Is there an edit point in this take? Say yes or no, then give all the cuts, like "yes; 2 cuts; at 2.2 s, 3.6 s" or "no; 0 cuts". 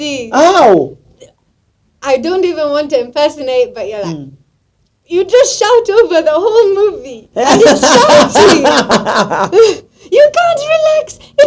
yes; 1 cut; at 8.9 s